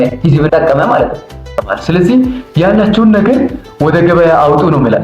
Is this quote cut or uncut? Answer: cut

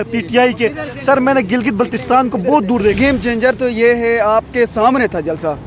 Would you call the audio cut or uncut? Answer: cut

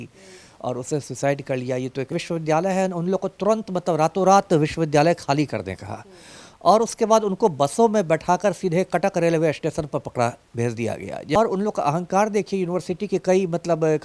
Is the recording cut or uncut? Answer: cut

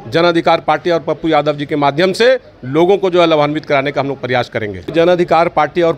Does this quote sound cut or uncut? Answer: cut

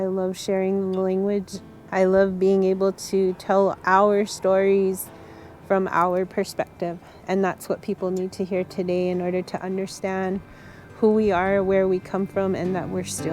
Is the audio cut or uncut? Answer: cut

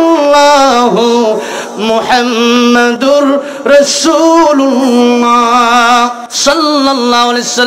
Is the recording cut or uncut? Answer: cut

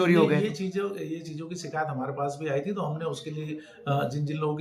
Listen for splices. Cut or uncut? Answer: uncut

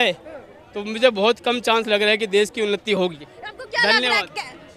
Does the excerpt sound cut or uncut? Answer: uncut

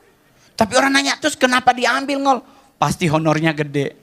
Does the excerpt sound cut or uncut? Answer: uncut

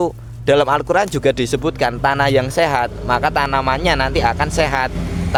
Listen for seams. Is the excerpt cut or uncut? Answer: uncut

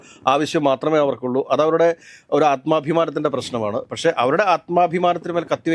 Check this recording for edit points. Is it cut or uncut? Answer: uncut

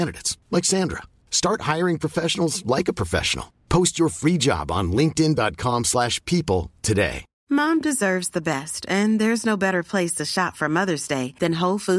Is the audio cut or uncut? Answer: cut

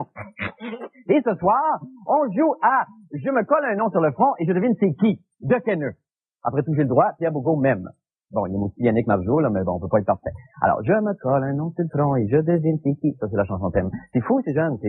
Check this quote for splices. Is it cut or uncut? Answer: uncut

